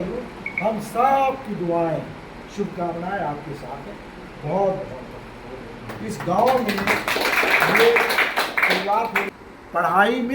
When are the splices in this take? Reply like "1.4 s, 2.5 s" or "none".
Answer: 9.3 s